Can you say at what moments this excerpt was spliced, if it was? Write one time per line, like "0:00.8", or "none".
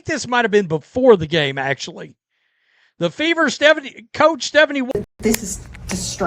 0:04.9